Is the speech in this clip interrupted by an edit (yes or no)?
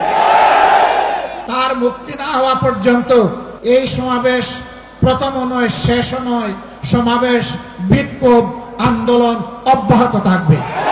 yes